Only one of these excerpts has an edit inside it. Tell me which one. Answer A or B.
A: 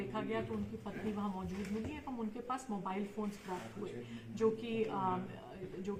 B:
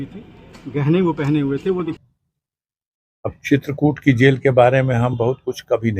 B